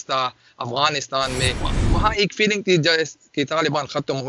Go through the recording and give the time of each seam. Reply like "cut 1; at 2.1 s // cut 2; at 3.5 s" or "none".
cut 1; at 1.7 s